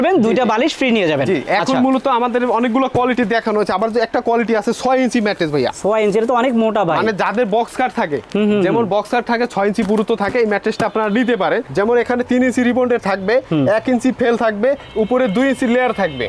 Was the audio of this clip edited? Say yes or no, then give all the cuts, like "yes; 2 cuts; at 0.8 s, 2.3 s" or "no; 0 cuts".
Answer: no; 0 cuts